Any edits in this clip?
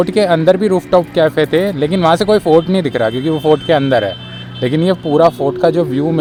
no; 0 cuts

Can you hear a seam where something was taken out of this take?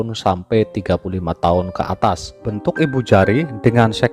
yes; 1 cut; at 2.5 s

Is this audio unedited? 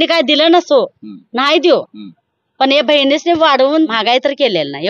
no; 1 cut; at 4.0 s

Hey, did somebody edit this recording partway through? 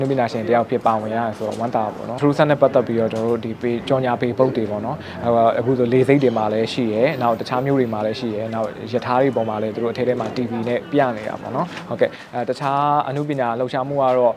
yes; 1 cut; at 2.1 s

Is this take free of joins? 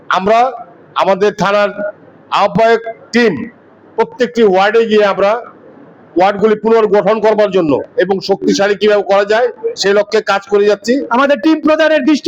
no; 1 cut; at 11.1 s

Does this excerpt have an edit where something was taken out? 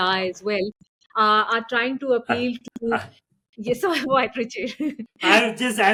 no; 0 cuts

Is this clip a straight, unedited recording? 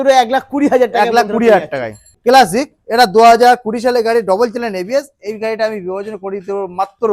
no; 1 cut; at 2.1 s

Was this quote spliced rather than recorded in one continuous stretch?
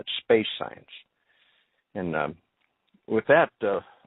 yes; 1 cut; at 1.4 s

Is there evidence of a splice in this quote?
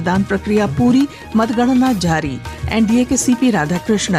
no; 0 cuts

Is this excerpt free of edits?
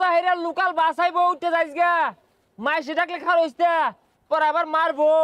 yes; 0 cuts

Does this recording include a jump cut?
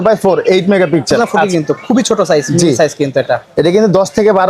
yes; 1 cut; at 1.2 s

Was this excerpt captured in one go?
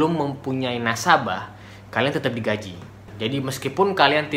no; 1 cut; at 3.1 s

